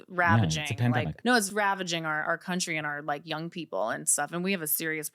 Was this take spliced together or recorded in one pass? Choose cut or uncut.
cut